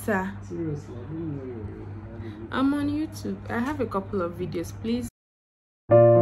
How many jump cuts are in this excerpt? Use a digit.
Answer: 1